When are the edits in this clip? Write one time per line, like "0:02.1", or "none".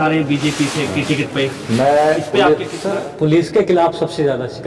0:02.8